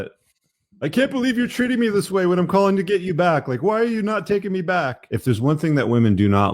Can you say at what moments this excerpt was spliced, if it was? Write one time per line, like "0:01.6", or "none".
0:05.0